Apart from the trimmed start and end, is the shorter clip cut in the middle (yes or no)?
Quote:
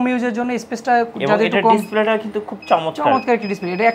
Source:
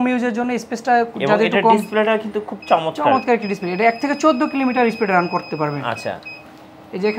no